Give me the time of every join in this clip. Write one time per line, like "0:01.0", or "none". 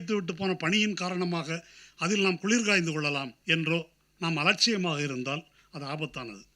0:03.3